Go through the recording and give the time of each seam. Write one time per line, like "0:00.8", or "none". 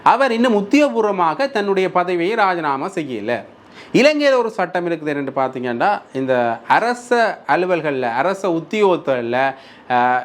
none